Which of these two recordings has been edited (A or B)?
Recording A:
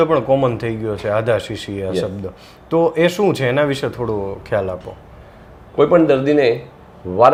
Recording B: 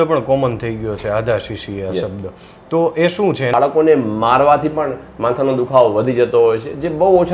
B